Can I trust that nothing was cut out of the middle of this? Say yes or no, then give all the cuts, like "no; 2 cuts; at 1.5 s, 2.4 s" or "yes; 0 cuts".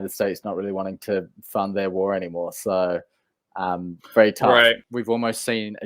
no; 1 cut; at 4.8 s